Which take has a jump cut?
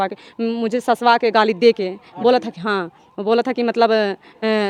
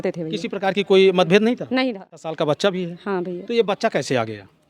second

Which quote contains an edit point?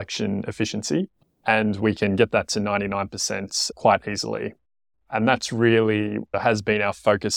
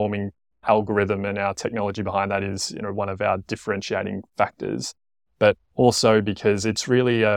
first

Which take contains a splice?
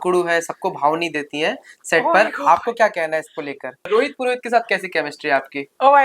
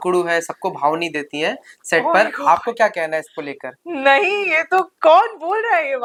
first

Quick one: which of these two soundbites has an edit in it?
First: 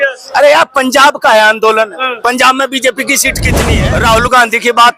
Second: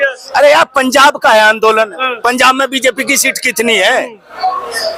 first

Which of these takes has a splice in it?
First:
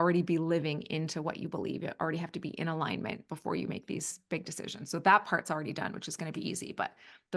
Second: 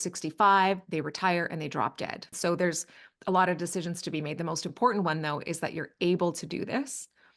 second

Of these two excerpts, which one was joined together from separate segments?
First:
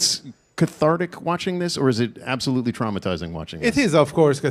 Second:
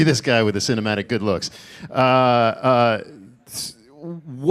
first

